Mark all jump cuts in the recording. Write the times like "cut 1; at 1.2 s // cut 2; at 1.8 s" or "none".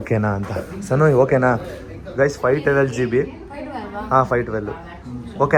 none

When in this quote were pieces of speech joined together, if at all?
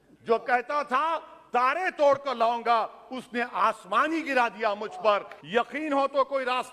cut 1; at 5.4 s

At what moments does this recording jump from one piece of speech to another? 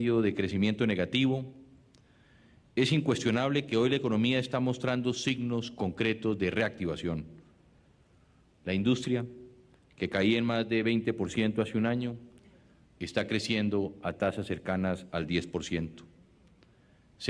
cut 1; at 6.1 s

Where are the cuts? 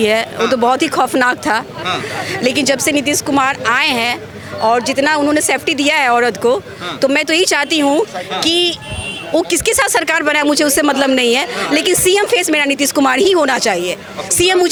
none

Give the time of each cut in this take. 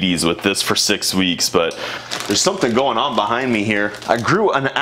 cut 1; at 1.9 s // cut 2; at 4.0 s

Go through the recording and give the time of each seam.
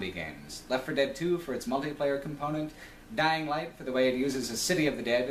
none

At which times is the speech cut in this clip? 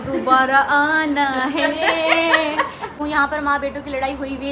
cut 1; at 2.9 s

